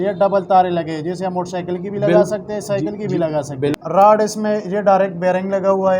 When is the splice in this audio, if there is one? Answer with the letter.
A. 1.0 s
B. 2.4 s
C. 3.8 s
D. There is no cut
C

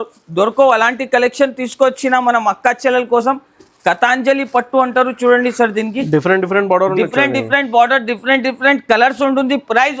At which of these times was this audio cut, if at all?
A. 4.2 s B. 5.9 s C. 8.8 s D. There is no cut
D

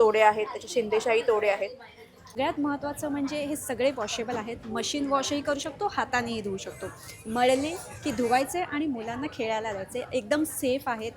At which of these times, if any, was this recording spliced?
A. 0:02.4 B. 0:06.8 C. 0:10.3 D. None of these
A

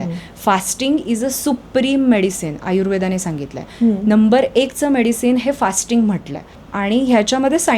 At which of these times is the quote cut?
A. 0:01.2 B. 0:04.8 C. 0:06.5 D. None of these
C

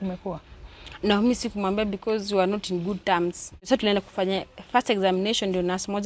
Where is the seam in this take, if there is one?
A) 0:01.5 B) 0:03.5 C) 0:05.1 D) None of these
B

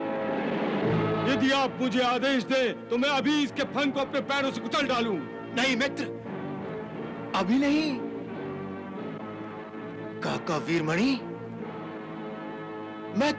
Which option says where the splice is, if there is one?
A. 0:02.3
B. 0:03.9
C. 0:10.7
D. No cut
D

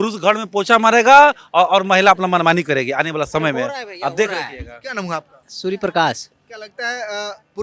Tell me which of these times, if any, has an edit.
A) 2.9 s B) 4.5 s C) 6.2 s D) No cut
D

